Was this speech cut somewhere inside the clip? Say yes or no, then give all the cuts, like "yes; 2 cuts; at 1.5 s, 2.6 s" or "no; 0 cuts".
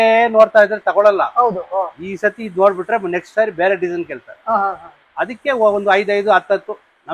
no; 0 cuts